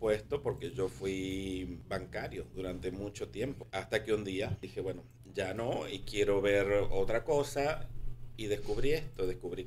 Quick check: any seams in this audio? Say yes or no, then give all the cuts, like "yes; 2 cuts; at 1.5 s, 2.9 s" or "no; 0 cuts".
yes; 3 cuts; at 1.8 s, 3.6 s, 4.6 s